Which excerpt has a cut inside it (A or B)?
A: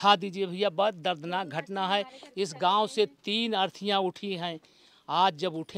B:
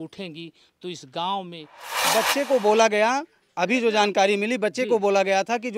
B